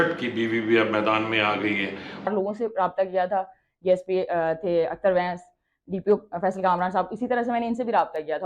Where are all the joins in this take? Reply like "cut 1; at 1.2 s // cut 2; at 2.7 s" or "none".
cut 1; at 2.0 s